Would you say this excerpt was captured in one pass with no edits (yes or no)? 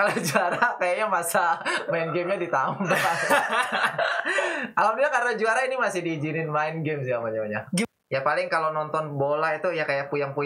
no